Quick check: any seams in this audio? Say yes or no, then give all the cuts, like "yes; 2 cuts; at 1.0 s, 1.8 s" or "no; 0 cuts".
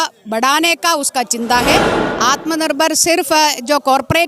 yes; 1 cut; at 1.9 s